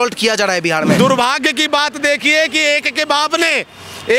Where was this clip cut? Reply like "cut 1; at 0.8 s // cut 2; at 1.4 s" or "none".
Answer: cut 1; at 1.0 s